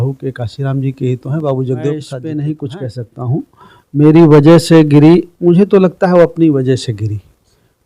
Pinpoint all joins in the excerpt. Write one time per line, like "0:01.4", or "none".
0:02.2